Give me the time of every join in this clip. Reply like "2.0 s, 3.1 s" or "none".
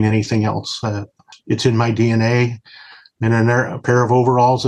1.3 s